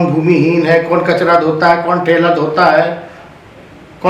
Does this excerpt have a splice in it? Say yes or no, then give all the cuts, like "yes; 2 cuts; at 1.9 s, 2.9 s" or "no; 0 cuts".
no; 0 cuts